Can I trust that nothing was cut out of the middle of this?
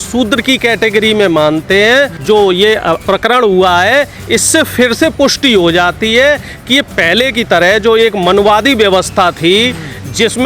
no; 3 cuts; at 2.2 s, 3.0 s, 6.9 s

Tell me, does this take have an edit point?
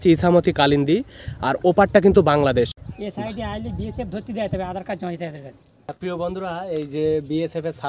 yes; 2 cuts; at 2.8 s, 5.9 s

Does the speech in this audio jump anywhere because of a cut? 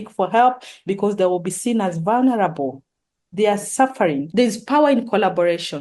yes; 1 cut; at 4.3 s

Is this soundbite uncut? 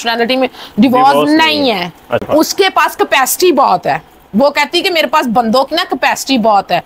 no; 1 cut; at 2.3 s

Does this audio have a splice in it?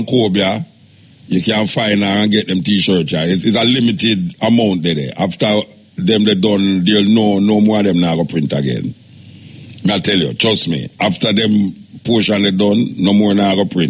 no; 0 cuts

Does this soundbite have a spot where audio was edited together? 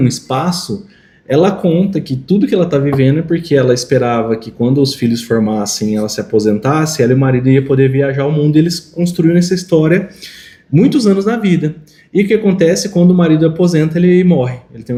no; 0 cuts

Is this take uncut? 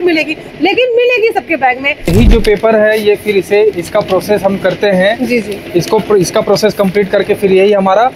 no; 1 cut; at 2.1 s

